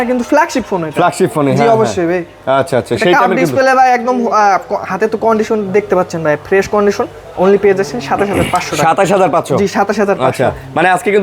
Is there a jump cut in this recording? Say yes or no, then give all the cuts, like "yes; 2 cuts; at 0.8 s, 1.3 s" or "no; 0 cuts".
no; 0 cuts